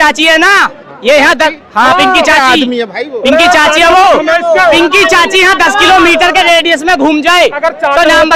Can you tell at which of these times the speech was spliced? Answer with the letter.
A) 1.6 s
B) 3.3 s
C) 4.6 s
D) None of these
D